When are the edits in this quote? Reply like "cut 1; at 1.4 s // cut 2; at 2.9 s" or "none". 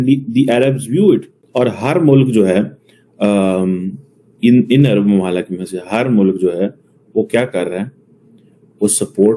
cut 1; at 1.4 s